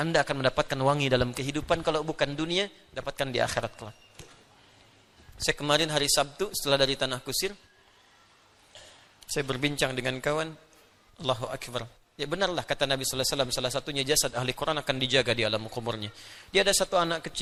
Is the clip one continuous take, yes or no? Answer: yes